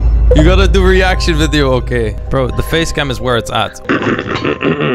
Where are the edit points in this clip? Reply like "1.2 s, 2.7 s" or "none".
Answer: 3.8 s